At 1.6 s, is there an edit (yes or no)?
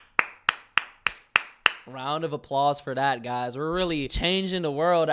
no